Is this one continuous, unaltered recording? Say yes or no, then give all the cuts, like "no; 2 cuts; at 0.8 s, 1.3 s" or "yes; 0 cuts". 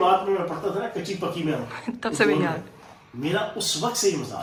yes; 0 cuts